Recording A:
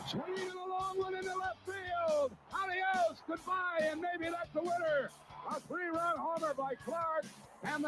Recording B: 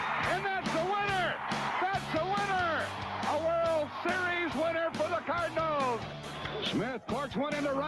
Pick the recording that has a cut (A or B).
A